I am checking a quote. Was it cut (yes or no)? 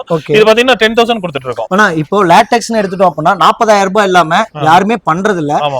no